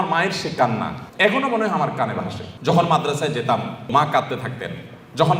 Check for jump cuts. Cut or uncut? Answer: cut